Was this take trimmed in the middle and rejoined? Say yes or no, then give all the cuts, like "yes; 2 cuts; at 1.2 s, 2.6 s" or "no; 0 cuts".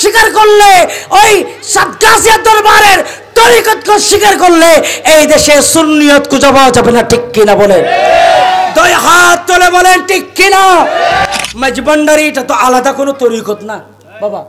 yes; 1 cut; at 11.2 s